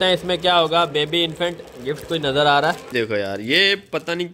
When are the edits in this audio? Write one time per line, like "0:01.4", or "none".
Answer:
0:02.9